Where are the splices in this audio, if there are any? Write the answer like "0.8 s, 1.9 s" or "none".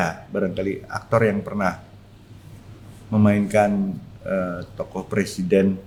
none